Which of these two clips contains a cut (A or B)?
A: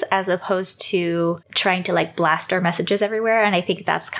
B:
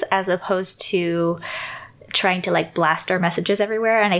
A